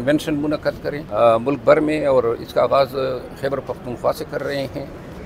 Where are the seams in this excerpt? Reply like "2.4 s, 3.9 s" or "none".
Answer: 1.0 s